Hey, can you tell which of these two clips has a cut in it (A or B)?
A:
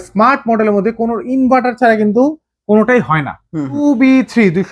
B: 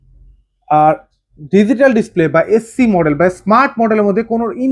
A